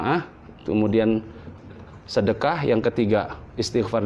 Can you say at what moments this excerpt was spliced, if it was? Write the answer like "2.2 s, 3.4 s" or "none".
1.4 s